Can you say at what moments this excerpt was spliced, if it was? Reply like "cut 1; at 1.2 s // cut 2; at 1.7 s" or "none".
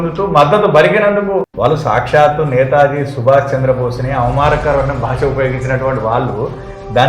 cut 1; at 1.5 s